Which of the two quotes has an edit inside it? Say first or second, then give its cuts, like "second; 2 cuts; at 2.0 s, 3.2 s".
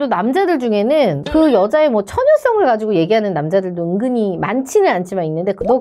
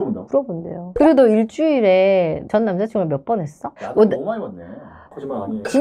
second; 3 cuts; at 0.9 s, 3.6 s, 4.9 s